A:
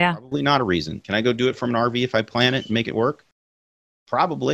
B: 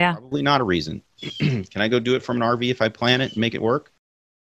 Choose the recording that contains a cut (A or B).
A